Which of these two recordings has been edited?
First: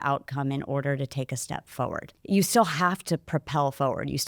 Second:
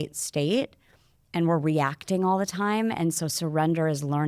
first; 1 cut; at 2.1 s

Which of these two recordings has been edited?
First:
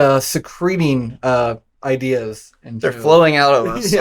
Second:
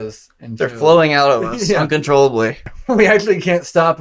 second; 1 cut; at 2.7 s

